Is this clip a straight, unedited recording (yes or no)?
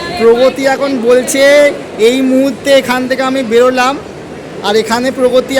yes